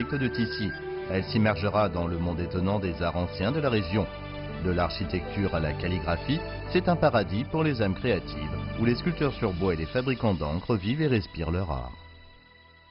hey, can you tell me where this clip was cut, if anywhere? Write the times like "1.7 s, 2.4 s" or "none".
12.0 s